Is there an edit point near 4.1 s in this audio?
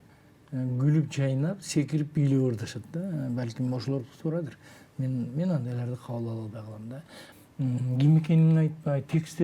no; 1 cut; at 7.2 s

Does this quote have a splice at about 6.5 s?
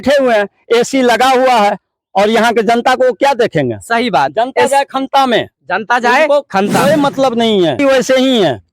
no; 1 cut; at 7.8 s

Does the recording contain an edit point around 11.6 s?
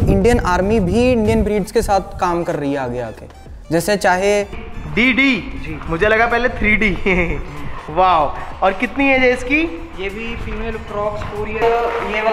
yes; 2 cuts; at 4.6 s, 11.6 s

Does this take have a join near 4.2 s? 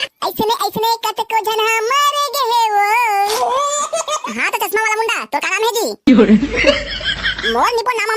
yes; 1 cut; at 4.2 s

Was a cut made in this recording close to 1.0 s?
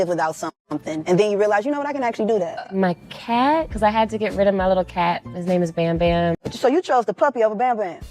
no; 2 cuts; at 2.7 s, 6.5 s

